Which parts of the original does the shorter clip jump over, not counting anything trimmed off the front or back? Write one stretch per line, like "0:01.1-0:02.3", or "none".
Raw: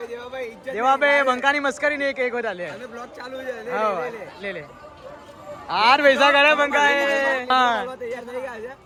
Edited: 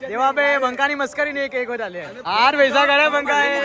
0:02.8-0:05.6

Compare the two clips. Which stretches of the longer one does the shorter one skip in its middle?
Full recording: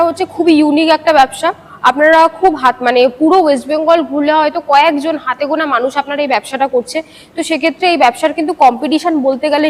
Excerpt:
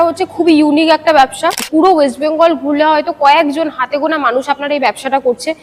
0:01.7-0:03.2

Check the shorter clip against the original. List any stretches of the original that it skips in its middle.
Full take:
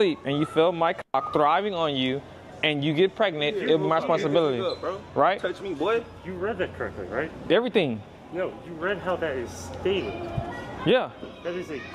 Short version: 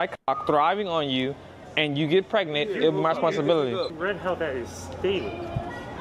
0:04.8-0:08.7

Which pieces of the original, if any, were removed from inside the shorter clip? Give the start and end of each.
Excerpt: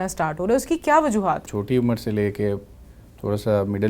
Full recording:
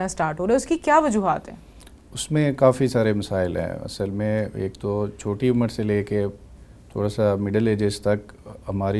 0:01.5-0:05.2

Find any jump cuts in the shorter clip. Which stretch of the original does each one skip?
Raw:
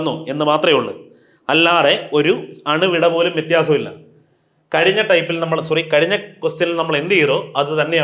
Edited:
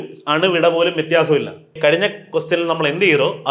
0:04.2-0:05.9

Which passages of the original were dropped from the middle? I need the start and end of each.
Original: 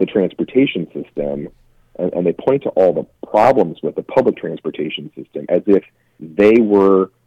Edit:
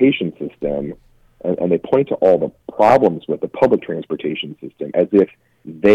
none

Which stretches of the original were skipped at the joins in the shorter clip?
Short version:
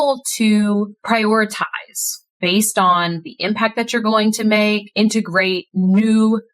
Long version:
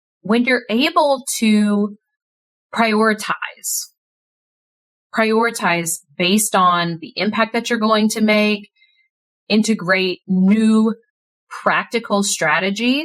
0:02.0-0:02.7
0:03.9-0:06.0
0:08.6-0:09.4

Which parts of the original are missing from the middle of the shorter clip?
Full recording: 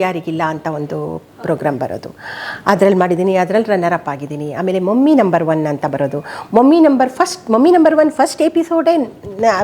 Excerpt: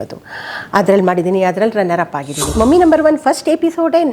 0:04.4-0:07.4

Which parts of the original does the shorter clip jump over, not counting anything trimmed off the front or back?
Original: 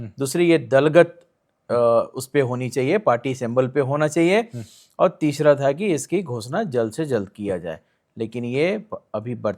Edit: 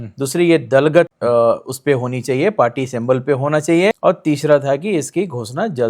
0:01.1-0:01.6
0:04.5-0:04.9

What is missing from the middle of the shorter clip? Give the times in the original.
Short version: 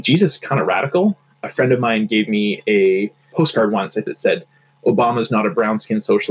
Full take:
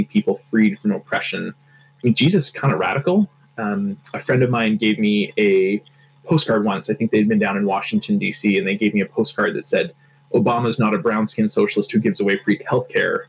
0:03.5-0:04.0
0:05.9-0:06.1
0:07.0-0:09.5

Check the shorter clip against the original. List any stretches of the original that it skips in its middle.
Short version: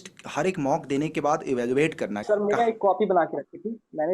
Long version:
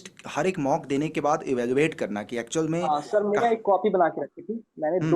0:02.2-0:03.1

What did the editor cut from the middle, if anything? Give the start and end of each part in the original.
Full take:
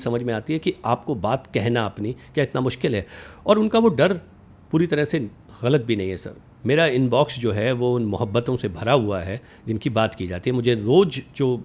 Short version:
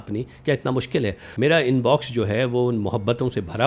0:03.1-0:06.5

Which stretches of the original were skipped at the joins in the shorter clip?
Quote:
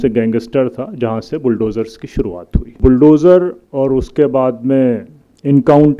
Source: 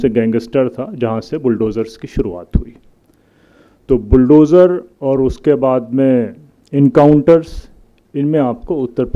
0:02.8-0:04.0

